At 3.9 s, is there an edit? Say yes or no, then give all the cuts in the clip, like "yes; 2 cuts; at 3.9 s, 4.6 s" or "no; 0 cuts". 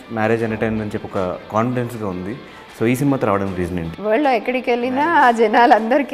yes; 1 cut; at 3.9 s